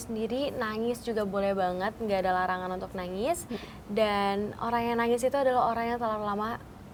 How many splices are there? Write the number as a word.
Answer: zero